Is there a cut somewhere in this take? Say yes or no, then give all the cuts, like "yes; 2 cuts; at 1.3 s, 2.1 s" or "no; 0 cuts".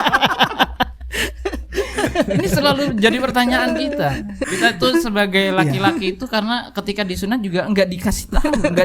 yes; 1 cut; at 4.3 s